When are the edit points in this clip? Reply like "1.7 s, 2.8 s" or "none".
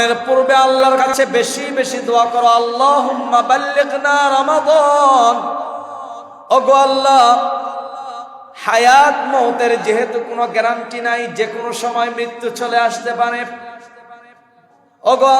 1.0 s